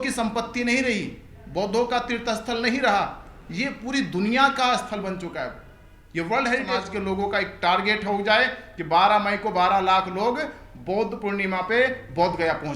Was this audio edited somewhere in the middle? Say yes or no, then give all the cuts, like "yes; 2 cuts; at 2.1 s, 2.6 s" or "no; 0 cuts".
yes; 1 cut; at 6.7 s